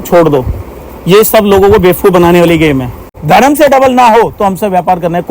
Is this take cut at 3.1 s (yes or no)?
yes